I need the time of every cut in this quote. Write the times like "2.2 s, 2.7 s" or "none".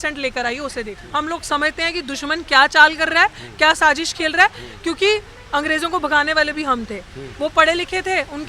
1.0 s